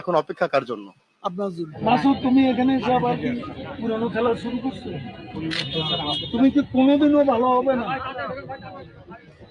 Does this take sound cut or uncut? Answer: cut